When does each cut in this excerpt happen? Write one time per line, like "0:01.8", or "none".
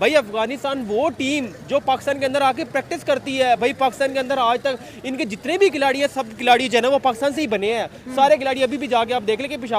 none